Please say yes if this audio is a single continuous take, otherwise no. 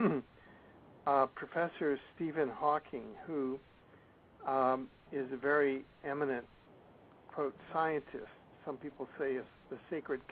yes